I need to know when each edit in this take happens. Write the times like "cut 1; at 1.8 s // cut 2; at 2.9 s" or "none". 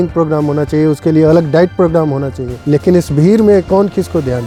none